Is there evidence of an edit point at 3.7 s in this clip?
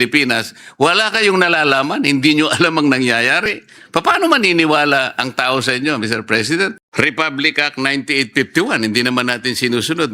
no; 1 cut; at 6.8 s

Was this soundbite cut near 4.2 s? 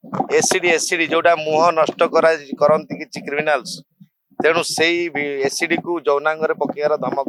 no; 0 cuts

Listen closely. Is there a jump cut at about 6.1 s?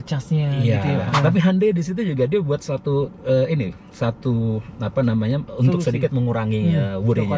no; 1 cut; at 1.1 s

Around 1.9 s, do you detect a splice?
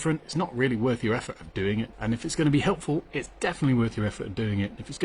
yes; 1 cut; at 1.9 s

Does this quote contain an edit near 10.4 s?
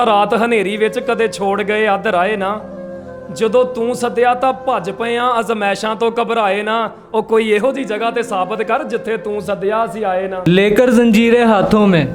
yes; 1 cut; at 10.4 s

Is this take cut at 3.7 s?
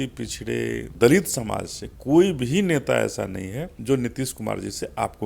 yes; 2 cuts; at 0.9 s, 3.7 s

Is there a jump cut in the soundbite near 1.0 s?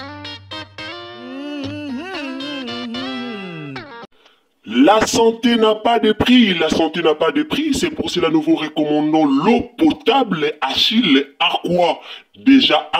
no; 1 cut; at 3.9 s

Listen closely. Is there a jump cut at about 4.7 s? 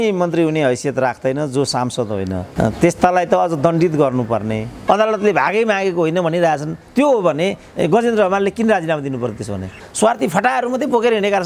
yes; 3 cuts; at 2.5 s, 4.7 s, 9.9 s

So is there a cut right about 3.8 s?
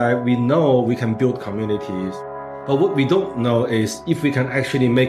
no; 1 cut; at 2.3 s

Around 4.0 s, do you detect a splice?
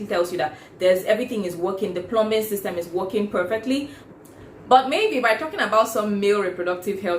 yes; 1 cut; at 4.0 s

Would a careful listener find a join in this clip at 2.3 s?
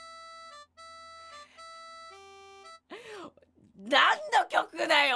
no; 0 cuts

